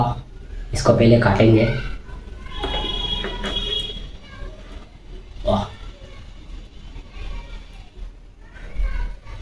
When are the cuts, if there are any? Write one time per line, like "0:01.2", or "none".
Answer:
none